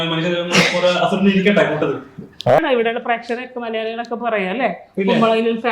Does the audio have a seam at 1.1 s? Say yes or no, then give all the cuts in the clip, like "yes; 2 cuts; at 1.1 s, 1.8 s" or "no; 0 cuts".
no; 1 cut; at 2.6 s